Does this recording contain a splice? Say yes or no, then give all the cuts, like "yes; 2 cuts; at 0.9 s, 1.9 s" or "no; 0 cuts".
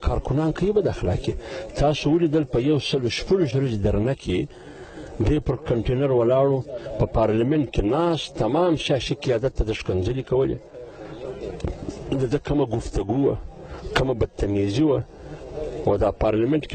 no; 0 cuts